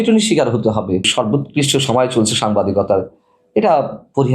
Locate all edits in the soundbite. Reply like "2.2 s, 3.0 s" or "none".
1.0 s